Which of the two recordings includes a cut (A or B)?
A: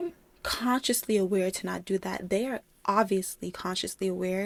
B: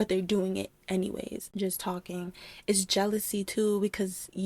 B